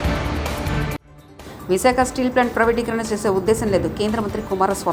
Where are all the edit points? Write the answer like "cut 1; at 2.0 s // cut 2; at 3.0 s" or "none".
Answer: none